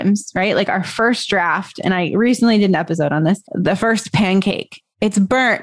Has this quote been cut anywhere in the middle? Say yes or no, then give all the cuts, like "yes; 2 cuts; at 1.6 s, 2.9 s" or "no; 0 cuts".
no; 0 cuts